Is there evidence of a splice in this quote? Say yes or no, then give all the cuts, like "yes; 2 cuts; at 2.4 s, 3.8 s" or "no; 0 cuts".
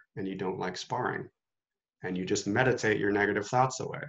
no; 0 cuts